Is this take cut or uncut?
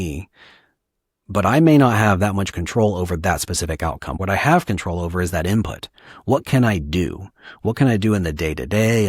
cut